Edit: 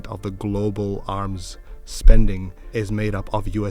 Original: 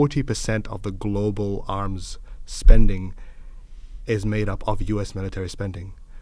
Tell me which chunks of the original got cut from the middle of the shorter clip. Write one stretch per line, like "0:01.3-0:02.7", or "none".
0:03.2-0:03.9